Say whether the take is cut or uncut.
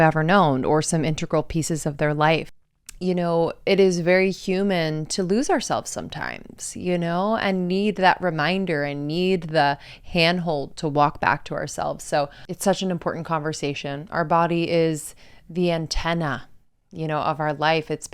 cut